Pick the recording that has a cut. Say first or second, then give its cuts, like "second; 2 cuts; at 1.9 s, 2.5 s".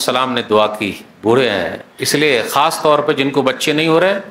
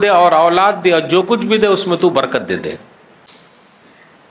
second; 1 cut; at 3.3 s